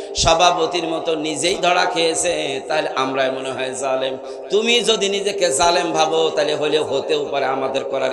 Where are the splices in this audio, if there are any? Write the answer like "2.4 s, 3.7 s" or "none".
none